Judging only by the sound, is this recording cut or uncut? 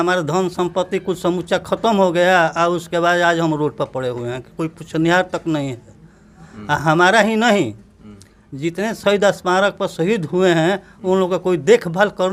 uncut